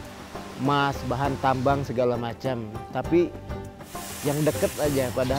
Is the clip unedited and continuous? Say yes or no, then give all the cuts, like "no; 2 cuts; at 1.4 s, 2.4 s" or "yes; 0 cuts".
yes; 0 cuts